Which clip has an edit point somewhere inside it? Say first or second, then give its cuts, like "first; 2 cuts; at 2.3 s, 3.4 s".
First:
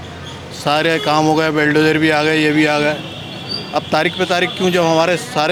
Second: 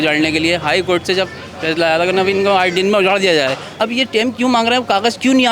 second; 1 cut; at 3.7 s